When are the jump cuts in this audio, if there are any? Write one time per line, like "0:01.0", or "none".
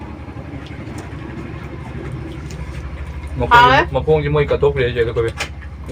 none